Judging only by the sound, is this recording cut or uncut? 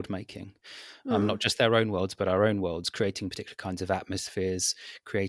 uncut